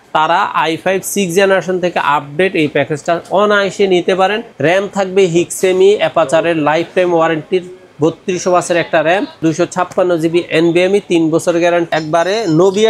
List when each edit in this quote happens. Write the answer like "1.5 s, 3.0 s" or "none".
4.5 s, 9.4 s, 11.9 s